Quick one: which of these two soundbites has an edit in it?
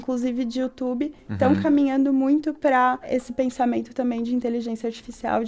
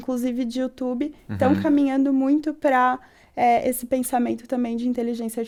first; 1 cut; at 3.1 s

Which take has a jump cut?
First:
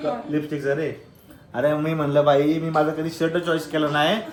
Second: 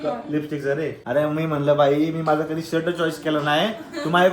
second; 1 cut; at 1.0 s

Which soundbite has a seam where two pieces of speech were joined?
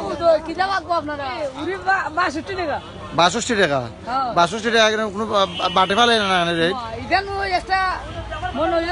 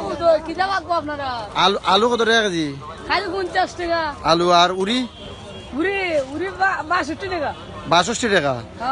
first; 1 cut; at 1.4 s

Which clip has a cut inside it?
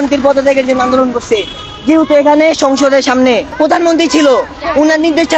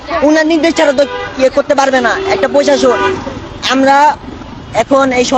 first; 1 cut; at 3.5 s

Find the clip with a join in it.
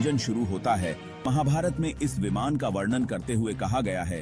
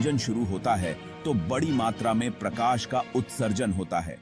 first; 1 cut; at 1.1 s

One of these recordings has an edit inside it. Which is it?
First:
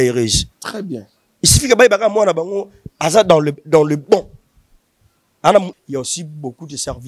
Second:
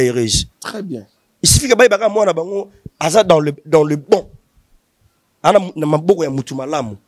first; 1 cut; at 5.7 s

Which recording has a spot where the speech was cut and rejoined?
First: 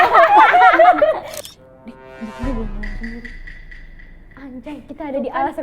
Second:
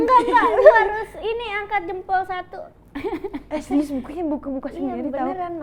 first; 1 cut; at 1.3 s

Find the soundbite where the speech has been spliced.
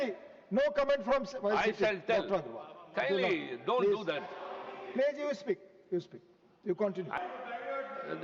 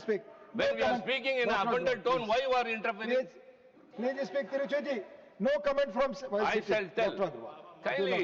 first; 1 cut; at 7.1 s

